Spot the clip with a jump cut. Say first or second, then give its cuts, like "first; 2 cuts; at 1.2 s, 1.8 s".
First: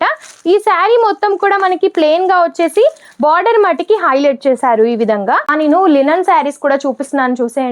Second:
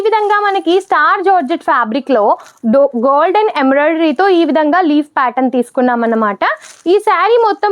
first; 1 cut; at 5.5 s